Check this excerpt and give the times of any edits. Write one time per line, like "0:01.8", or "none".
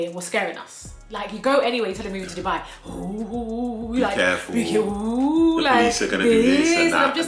none